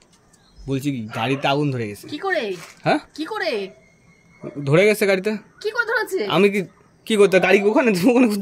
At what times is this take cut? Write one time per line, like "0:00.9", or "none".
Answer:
none